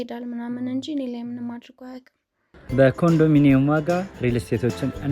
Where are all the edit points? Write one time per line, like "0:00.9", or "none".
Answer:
0:02.6